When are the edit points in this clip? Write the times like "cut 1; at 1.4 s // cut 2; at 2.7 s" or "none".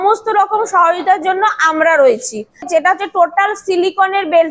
cut 1; at 2.7 s